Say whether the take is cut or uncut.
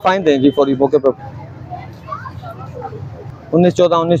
uncut